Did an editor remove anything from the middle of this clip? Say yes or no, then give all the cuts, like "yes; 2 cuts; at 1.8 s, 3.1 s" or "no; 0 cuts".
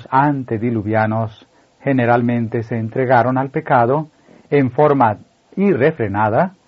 no; 0 cuts